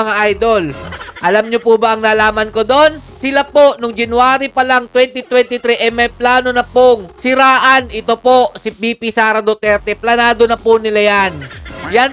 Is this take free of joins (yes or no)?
yes